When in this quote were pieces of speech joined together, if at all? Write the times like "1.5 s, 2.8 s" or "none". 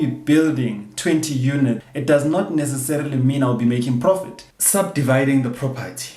1.9 s, 4.6 s